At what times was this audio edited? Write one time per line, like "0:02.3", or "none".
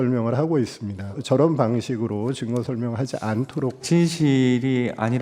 0:01.2
0:03.8

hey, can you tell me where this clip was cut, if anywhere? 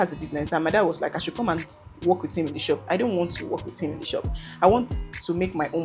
none

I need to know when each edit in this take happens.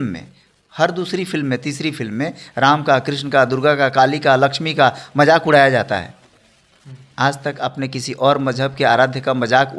none

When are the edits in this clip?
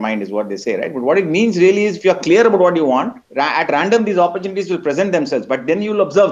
0:03.2

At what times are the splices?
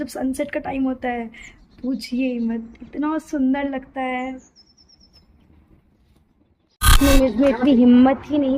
0:06.9

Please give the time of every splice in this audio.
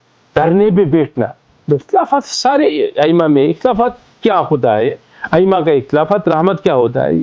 0:01.8

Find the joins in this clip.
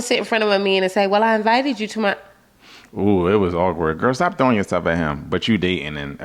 none

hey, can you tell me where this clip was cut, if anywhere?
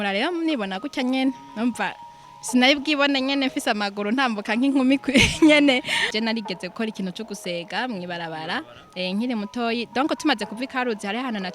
0:06.1

